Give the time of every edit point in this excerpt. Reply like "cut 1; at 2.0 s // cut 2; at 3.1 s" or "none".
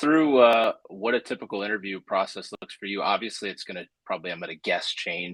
none